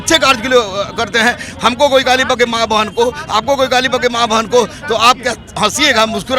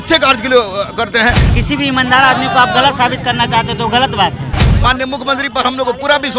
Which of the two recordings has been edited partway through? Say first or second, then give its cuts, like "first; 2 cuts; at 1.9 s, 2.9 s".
second; 2 cuts; at 1.5 s, 4.7 s